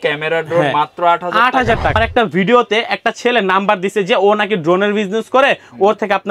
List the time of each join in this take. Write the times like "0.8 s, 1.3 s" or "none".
1.9 s